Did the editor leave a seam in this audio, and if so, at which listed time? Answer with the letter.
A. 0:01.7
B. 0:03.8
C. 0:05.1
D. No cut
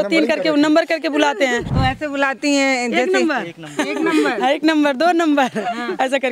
A